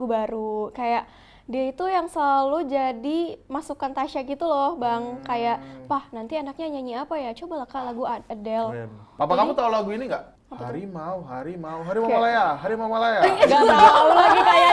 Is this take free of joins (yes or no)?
no